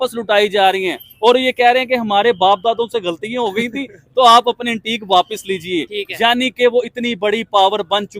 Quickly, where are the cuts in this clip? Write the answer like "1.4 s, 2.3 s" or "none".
none